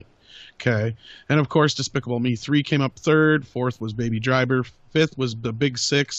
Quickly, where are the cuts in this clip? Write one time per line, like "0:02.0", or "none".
none

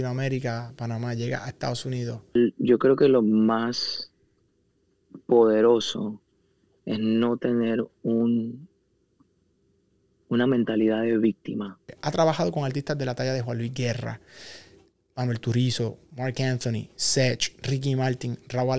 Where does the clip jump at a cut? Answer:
0:02.4
0:11.9

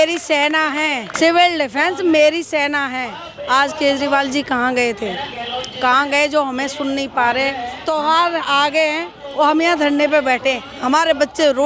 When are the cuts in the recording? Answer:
0:01.1
0:07.7

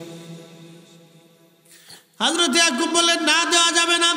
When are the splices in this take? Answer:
none

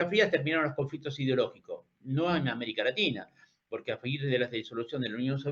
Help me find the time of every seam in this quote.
none

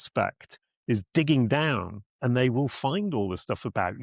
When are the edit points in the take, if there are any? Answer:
none

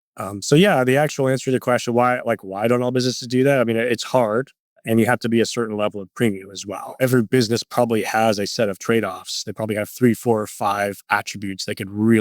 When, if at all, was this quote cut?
0:07.0

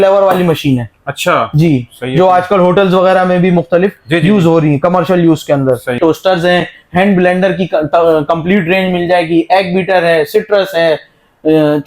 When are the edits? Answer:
0:06.0

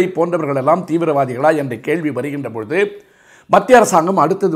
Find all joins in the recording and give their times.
none

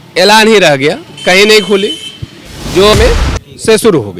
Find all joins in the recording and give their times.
0:02.9

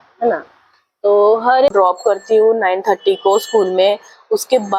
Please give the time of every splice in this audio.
0:01.7

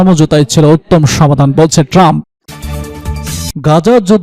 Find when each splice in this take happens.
0:02.3

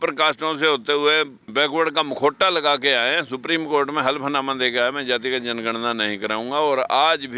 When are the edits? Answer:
0:01.5

